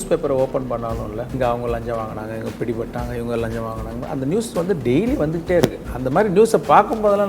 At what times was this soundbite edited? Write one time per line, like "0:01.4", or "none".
0:01.3

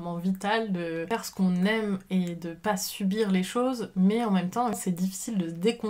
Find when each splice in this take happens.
0:04.8

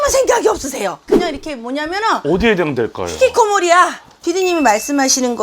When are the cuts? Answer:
0:01.1
0:04.1

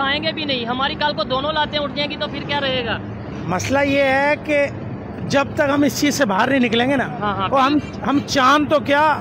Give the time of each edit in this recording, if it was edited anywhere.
none

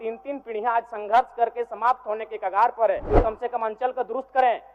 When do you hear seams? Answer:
0:03.2

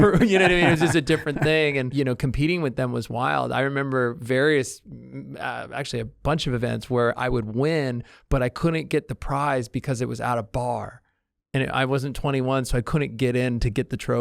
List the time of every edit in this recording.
0:01.9

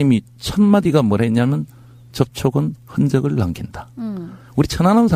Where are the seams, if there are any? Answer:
none

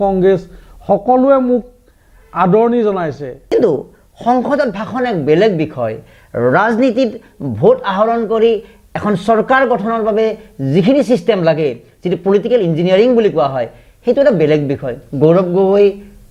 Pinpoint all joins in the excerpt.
0:03.3

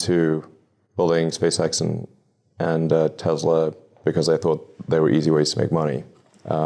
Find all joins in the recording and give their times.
none

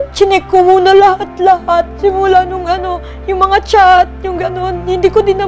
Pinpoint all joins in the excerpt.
none

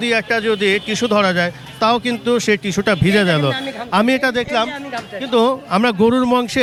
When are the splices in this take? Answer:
none

